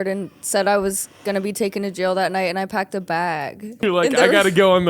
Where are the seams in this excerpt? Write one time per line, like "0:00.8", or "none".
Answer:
0:03.8